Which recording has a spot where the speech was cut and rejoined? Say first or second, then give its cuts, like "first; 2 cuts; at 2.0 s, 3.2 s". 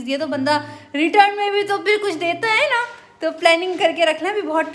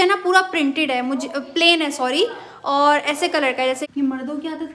second; 1 cut; at 3.8 s